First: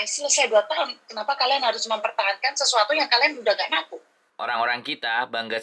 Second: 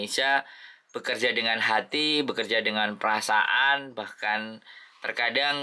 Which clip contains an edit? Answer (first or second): first